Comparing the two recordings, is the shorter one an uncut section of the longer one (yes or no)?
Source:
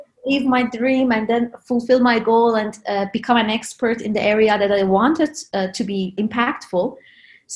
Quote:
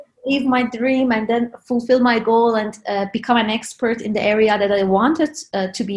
yes